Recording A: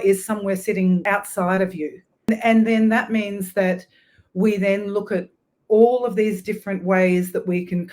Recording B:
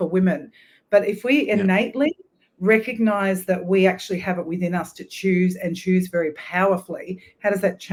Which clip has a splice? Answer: A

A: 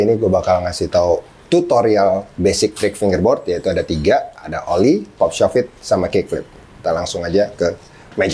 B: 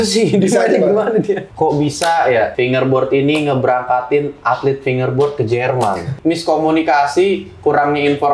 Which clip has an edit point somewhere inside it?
B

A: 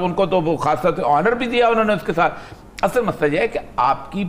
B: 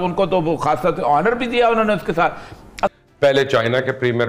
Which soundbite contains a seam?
B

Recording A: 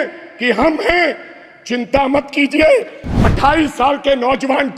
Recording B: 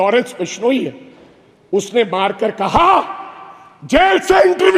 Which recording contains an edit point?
A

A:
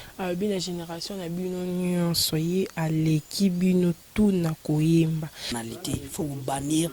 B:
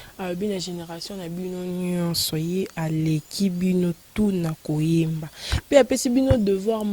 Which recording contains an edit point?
A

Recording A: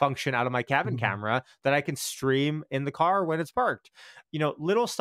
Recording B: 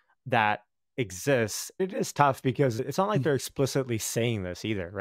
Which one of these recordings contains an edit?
B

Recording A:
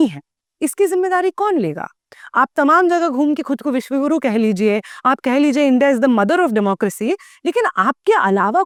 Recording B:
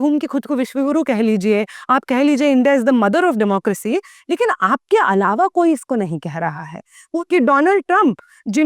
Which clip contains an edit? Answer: B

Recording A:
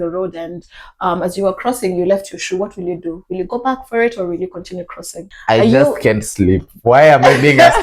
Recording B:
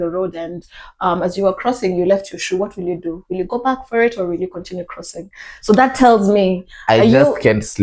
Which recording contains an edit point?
A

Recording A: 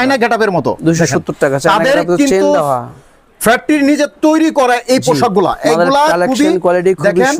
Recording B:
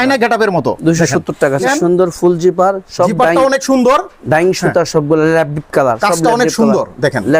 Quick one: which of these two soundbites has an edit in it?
B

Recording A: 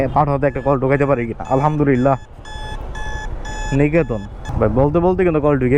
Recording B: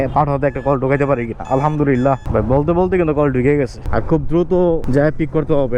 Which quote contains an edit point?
B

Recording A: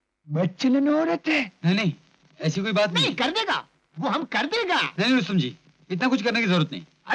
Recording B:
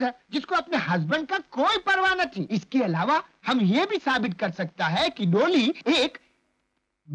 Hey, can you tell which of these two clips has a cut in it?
B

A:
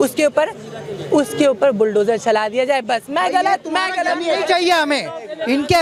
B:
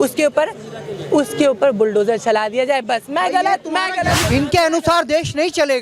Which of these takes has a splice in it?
B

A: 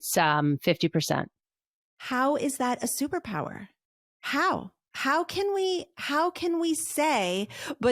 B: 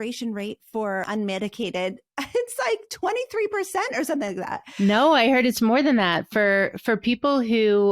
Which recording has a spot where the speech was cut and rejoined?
B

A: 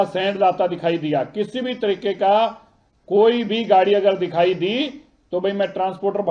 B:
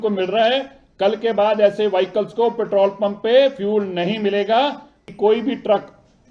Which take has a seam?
B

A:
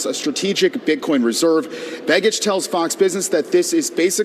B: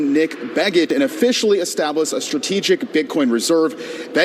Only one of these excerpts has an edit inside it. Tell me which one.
B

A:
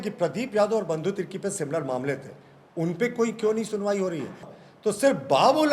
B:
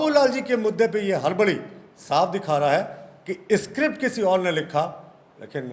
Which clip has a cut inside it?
A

